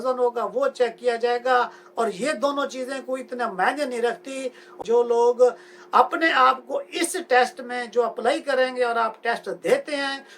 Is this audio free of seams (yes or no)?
no